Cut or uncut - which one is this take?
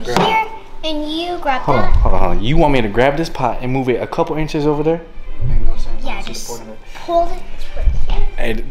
uncut